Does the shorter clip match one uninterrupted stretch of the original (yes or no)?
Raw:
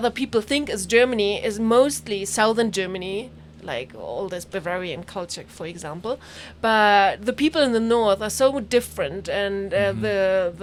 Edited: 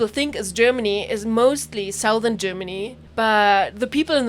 no